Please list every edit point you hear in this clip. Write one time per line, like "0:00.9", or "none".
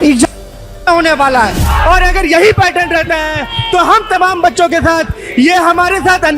0:01.7